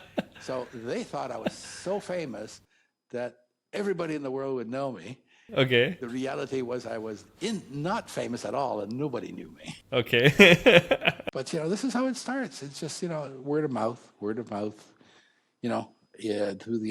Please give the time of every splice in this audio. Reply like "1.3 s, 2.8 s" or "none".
4.9 s, 6.0 s, 9.8 s, 11.2 s